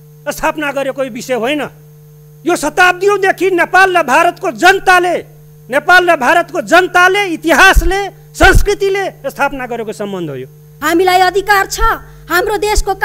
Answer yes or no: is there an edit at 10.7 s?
yes